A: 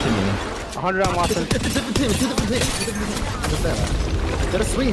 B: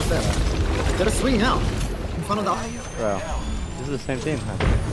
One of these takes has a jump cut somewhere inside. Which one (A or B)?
B